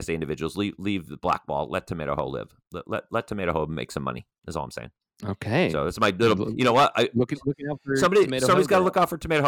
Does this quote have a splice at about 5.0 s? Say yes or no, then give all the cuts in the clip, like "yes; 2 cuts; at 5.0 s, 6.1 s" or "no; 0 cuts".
yes; 1 cut; at 5.0 s